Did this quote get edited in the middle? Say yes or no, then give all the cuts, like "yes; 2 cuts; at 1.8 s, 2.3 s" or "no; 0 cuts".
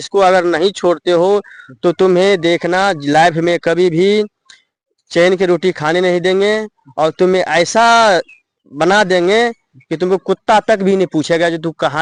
no; 0 cuts